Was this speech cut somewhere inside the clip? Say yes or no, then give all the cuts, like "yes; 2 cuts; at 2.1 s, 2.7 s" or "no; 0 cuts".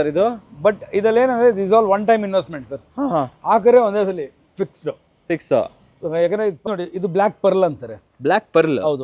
yes; 1 cut; at 6.6 s